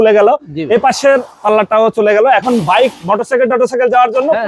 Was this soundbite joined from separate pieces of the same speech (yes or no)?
no